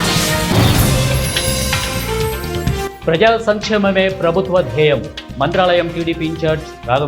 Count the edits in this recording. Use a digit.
0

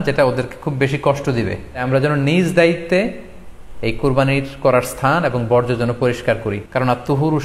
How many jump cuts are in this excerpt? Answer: 2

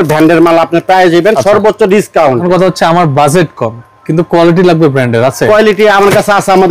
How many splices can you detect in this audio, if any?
1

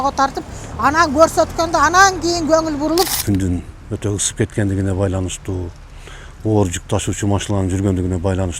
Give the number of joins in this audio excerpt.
1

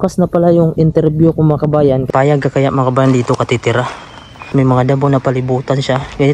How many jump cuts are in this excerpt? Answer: 2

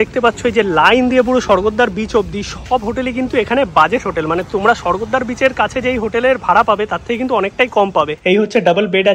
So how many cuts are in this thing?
1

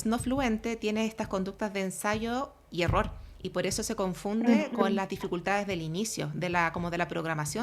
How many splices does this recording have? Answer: 0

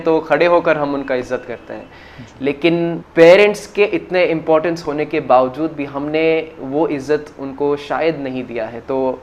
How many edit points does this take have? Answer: 1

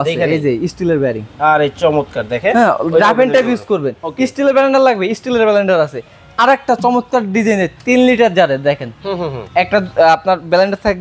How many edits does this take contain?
0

